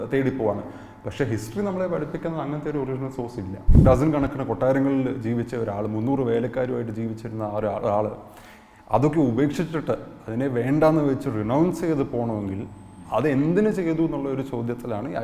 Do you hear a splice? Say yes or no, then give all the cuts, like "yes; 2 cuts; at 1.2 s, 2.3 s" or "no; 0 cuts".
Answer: yes; 1 cut; at 3.8 s